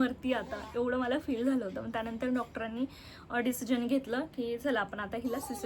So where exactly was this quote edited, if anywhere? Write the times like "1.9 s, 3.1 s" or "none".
none